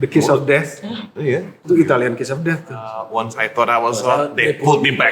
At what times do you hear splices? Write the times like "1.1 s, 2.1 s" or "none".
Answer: 3.0 s